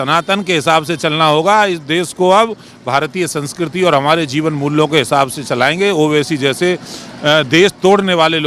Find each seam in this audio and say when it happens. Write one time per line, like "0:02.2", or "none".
none